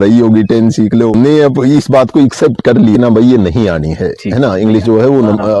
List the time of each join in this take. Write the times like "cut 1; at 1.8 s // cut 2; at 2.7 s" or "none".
cut 1; at 1.1 s // cut 2; at 3.0 s